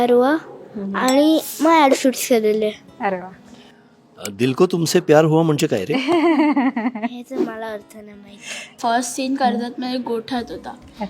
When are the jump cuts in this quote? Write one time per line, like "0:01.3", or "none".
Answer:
0:08.8